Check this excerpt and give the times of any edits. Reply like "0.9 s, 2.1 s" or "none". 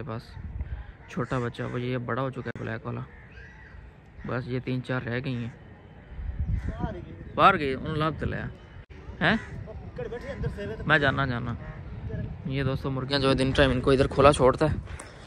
none